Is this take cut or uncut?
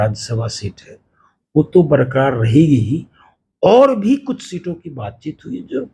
uncut